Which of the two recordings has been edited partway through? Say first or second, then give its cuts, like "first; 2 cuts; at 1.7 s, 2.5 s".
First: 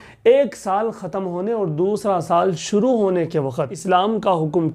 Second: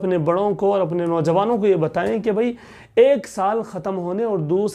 first; 1 cut; at 3.5 s